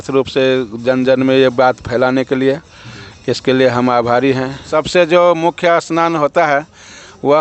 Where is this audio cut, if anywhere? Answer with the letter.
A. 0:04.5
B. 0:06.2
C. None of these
A